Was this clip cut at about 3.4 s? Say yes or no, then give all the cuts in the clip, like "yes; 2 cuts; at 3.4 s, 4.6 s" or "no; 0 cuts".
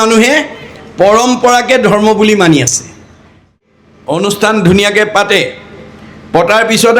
yes; 1 cut; at 3.4 s